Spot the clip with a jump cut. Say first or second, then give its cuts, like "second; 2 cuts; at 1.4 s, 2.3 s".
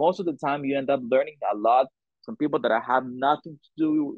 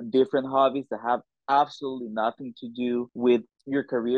second; 1 cut; at 3.1 s